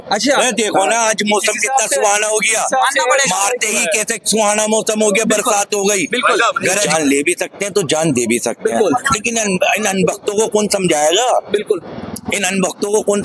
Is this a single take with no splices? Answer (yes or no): no